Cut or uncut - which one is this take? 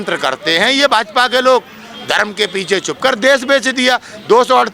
uncut